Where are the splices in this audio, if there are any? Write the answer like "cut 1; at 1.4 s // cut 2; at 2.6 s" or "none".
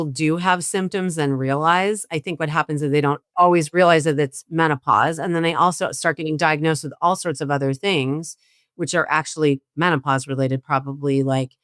cut 1; at 3.2 s